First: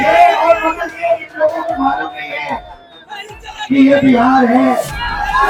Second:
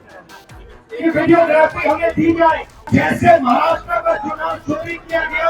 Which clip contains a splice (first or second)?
second